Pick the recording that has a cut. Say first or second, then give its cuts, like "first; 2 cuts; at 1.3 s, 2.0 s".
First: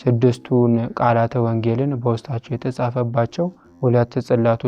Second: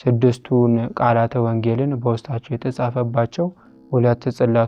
first; 1 cut; at 3.6 s